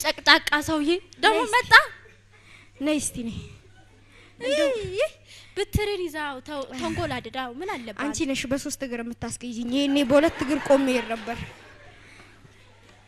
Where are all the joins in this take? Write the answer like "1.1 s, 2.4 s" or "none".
none